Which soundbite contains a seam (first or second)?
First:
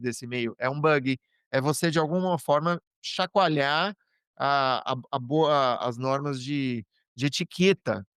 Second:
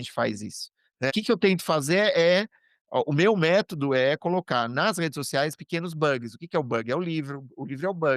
second